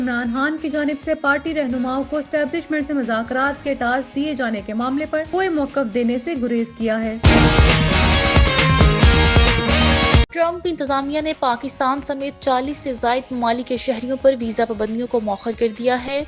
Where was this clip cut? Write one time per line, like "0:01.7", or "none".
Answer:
0:07.2
0:10.3